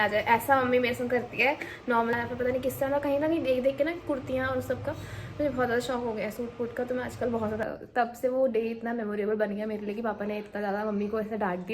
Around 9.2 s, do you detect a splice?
no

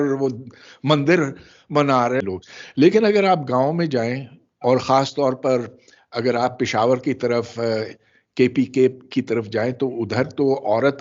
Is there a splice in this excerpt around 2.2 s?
yes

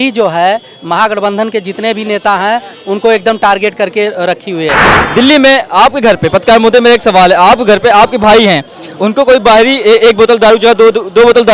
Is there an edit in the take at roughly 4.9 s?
yes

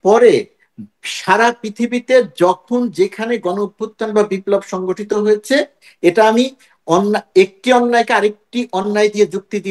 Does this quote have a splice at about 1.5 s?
no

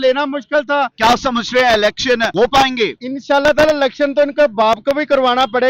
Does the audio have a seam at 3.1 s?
yes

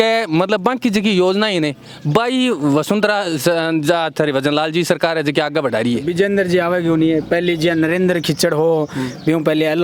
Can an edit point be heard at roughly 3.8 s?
no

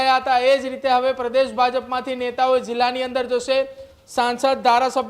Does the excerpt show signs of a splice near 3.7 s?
no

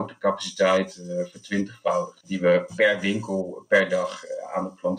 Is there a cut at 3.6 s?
no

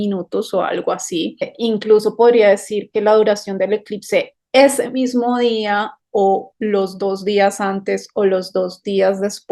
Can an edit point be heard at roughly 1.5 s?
yes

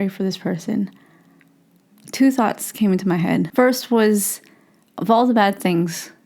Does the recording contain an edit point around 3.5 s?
yes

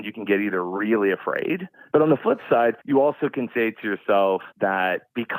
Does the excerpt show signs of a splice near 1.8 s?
yes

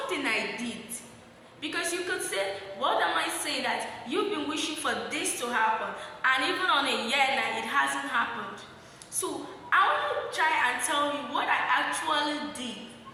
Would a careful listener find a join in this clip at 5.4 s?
no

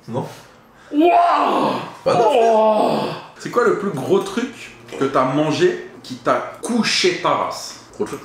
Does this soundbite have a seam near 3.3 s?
yes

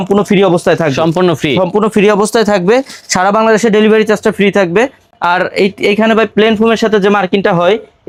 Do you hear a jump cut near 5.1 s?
no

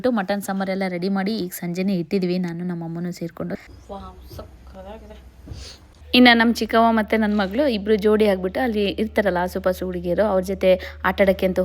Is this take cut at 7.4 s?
no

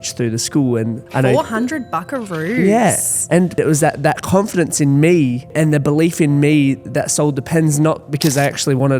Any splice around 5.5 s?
yes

